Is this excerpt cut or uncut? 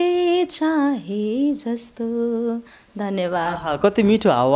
uncut